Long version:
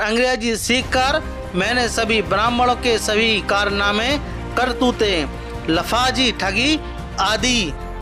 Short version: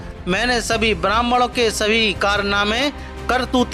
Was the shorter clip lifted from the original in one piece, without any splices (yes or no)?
yes